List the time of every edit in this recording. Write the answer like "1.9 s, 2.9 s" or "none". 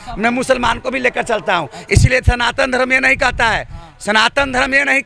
none